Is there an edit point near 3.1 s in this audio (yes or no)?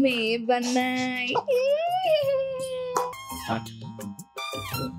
yes